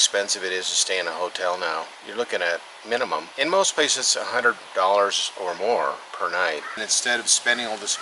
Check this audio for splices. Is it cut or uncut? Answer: cut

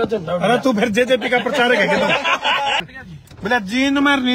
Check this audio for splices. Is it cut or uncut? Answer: cut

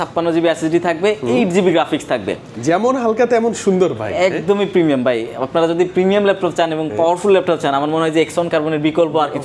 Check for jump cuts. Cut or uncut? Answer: uncut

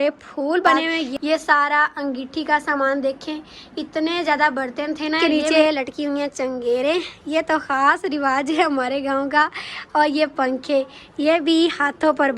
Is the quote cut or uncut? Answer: cut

